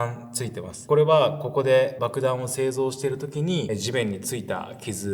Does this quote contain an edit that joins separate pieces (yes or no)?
yes